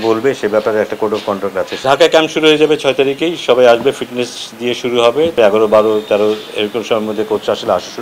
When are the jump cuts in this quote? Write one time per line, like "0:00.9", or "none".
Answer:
0:01.8
0:05.3